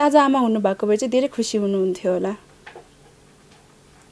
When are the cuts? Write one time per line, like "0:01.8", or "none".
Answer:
none